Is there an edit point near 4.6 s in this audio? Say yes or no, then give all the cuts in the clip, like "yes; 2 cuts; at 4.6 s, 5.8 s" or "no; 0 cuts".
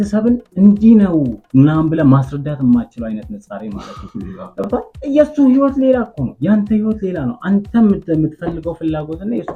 no; 0 cuts